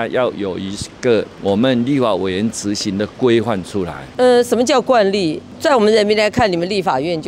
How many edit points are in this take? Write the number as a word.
one